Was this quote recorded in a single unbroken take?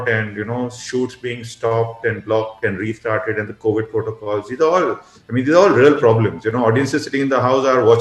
yes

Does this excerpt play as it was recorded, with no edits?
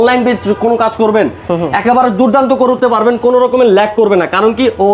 yes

